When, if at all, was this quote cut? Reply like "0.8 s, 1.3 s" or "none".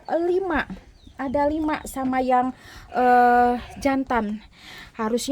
none

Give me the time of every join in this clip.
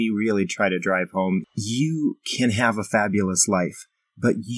1.4 s

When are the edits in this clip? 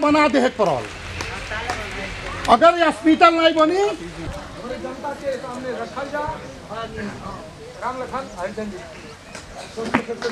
none

